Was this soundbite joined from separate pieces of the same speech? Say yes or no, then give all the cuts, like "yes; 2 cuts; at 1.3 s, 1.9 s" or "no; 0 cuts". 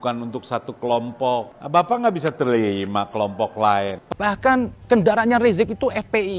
yes; 1 cut; at 4.0 s